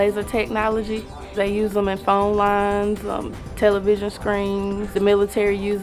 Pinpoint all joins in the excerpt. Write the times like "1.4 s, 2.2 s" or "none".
4.8 s